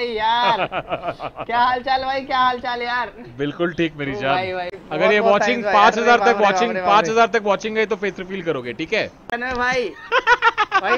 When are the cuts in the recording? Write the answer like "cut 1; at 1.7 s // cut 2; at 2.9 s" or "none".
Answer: cut 1; at 4.8 s // cut 2; at 9.3 s